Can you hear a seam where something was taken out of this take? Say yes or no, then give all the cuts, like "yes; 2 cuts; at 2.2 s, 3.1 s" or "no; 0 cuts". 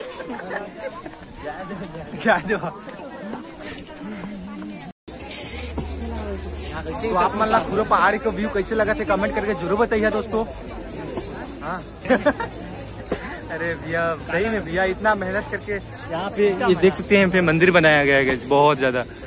yes; 2 cuts; at 5.0 s, 12.1 s